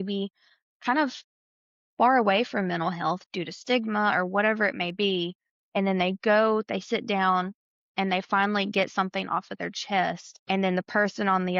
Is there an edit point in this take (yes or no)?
yes